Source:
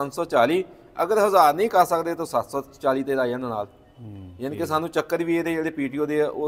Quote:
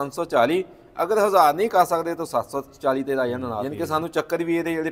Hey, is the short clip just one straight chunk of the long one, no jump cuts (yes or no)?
no